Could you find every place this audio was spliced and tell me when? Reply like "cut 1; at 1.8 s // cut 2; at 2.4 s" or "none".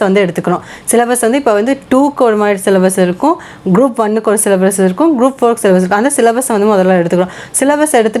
none